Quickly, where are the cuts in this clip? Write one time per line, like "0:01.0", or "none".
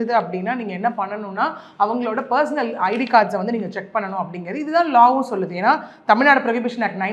none